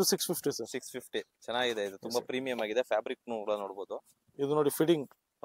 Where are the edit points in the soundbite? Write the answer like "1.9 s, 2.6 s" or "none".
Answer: 4.2 s